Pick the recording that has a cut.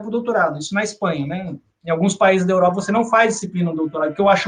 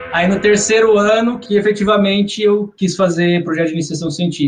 second; 2 cuts; at 1.4 s, 2.7 s

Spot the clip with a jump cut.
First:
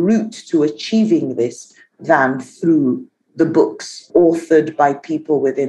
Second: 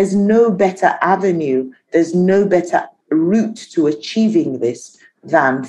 first; 1 cut; at 4.0 s

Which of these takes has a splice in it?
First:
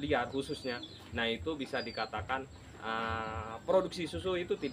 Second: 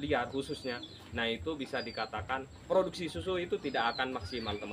second; 1 cut; at 2.6 s

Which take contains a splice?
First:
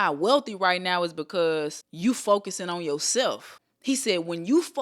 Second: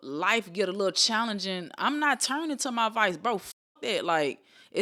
first; 1 cut; at 1.8 s

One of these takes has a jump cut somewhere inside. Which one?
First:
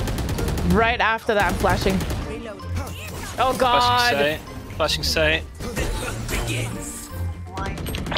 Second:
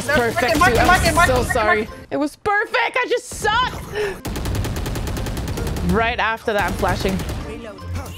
second; 2 cuts; at 2.0 s, 4.2 s

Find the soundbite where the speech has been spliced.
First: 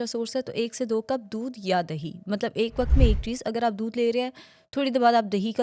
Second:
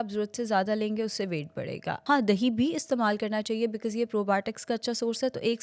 second; 1 cut; at 2.0 s

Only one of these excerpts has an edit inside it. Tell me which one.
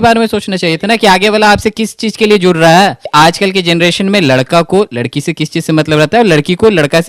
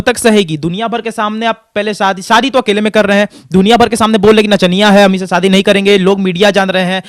first; 1 cut; at 3.0 s

